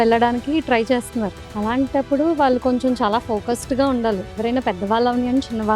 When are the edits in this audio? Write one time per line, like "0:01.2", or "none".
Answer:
0:04.3